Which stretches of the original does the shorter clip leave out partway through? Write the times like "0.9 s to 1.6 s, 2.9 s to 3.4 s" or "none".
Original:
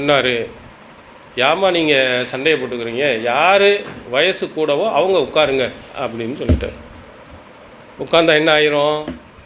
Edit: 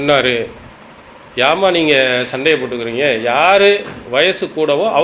none